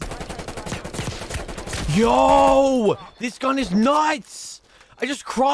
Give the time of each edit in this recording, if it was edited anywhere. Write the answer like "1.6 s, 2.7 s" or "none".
none